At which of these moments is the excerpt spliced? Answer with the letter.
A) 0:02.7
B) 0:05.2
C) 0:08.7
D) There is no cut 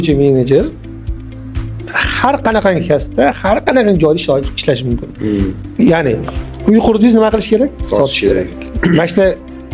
D